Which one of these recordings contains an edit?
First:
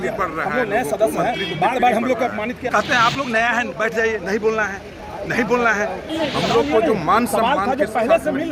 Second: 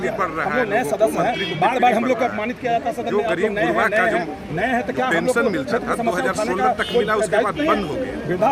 first; 2 cuts; at 2.7 s, 6.1 s

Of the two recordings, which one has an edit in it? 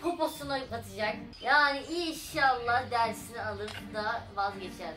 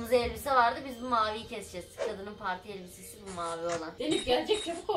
second; 1 cut; at 3.9 s

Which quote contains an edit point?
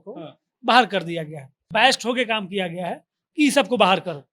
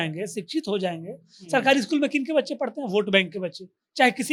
first; 1 cut; at 1.6 s

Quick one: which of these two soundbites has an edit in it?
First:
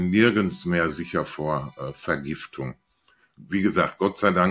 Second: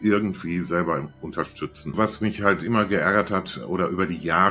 second; 1 cut; at 1.9 s

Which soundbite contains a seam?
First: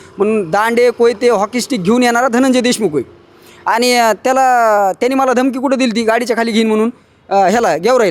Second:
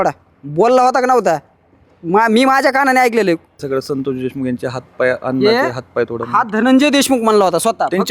second; 1 cut; at 3.6 s

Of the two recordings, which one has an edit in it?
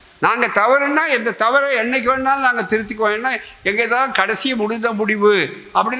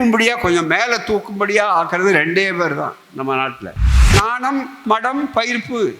second; 1 cut; at 4.0 s

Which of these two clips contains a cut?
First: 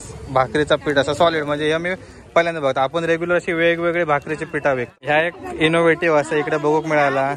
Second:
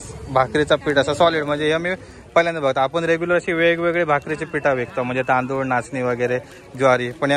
first; 1 cut; at 4.9 s

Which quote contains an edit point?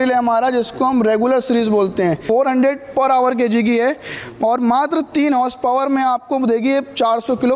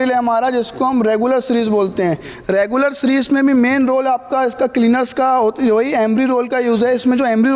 first; 1 cut; at 2.2 s

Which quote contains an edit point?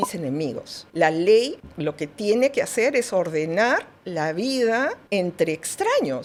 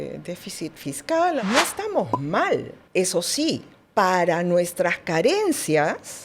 second; 1 cut; at 1.4 s

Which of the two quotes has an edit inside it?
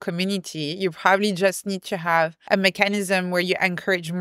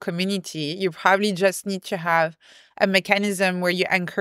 first; 1 cut; at 2.4 s

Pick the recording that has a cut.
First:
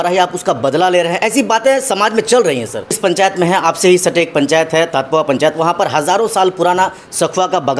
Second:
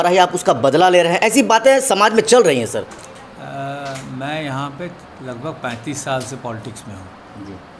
first; 1 cut; at 3.0 s

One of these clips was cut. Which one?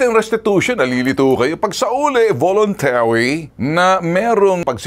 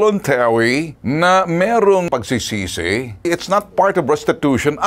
second; 1 cut; at 3.3 s

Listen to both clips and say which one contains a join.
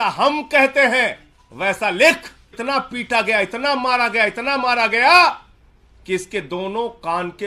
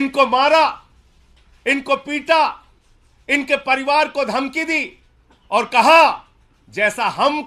first; 1 cut; at 2.6 s

